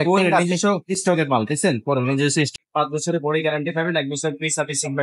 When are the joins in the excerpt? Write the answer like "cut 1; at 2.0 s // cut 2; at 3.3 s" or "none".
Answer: cut 1; at 2.6 s